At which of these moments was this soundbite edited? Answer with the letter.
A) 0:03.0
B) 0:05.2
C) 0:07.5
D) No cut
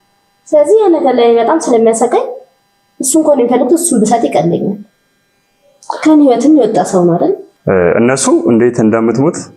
C